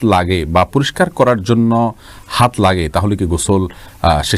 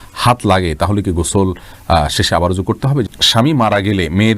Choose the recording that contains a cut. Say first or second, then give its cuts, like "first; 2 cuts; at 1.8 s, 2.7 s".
second; 1 cut; at 3.2 s